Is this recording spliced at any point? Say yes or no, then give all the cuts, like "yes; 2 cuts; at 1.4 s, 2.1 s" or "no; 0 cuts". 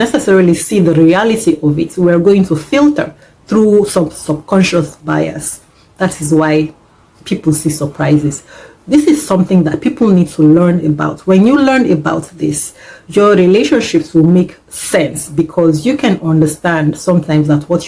no; 0 cuts